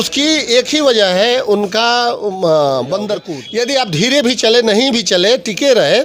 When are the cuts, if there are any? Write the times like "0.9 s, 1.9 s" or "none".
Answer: 3.4 s